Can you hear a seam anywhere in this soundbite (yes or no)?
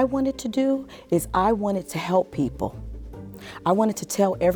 no